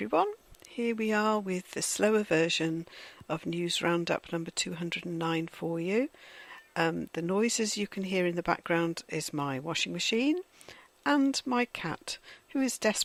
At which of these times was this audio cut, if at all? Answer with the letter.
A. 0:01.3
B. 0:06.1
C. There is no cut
C